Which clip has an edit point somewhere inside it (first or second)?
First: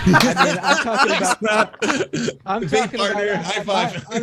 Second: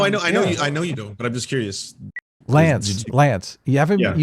second